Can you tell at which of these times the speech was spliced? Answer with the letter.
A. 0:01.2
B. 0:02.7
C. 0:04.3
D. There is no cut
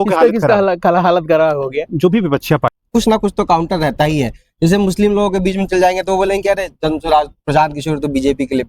B